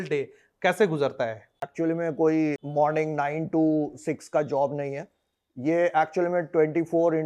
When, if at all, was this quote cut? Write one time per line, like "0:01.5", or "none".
0:01.6
0:02.6